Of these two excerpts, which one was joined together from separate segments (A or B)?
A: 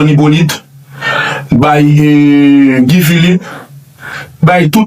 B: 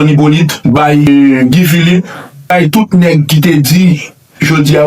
B